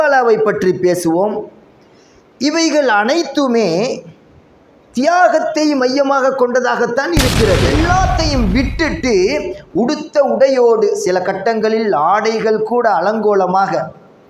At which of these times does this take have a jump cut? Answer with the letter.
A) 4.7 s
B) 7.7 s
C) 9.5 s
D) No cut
B